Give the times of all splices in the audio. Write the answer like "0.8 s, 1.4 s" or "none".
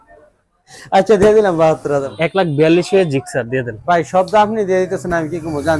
2.1 s